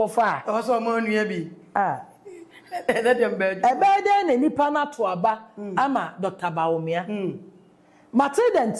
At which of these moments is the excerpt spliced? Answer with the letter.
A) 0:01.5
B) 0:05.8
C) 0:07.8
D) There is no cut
D